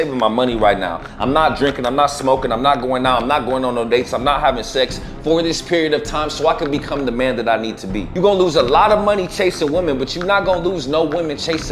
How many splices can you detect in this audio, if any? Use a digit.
1